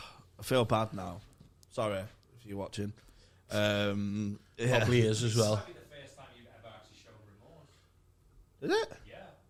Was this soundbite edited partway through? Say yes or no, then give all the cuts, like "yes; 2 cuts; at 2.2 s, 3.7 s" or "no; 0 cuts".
no; 0 cuts